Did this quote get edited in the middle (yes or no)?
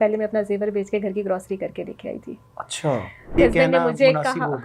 yes